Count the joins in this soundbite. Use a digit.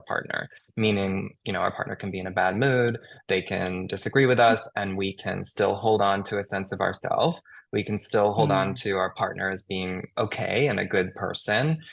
0